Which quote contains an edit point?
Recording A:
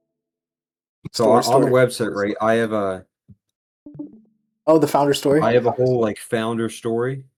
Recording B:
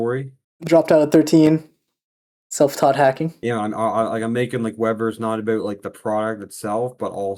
B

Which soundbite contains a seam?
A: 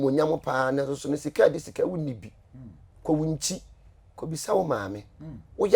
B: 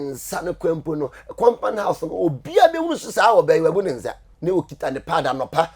B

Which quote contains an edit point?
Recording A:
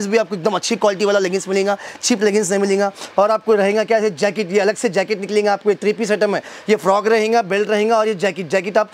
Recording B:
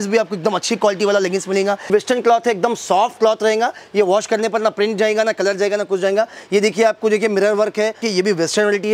B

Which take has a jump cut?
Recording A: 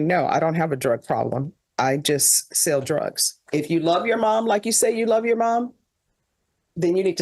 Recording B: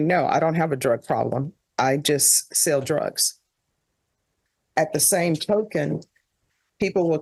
A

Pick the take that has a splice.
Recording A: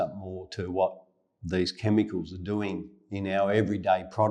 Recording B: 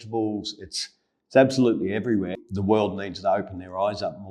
B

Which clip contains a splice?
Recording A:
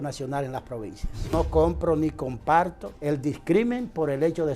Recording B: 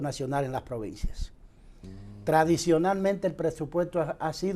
A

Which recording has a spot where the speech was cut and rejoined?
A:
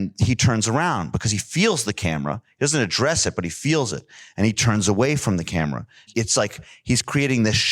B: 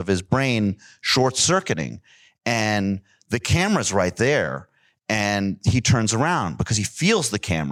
A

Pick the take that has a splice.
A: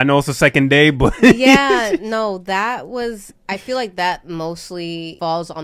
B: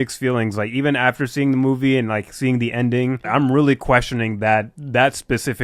B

